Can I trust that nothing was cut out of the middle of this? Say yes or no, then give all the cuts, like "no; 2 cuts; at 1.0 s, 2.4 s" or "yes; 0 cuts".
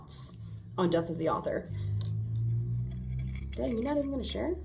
no; 1 cut; at 1.7 s